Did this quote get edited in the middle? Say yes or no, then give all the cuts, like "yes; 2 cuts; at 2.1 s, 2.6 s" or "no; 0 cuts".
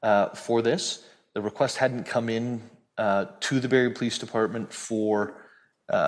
no; 0 cuts